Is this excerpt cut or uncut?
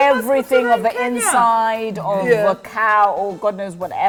uncut